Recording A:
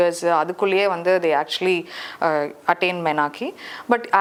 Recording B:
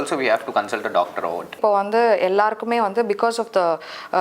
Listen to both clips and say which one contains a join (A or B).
B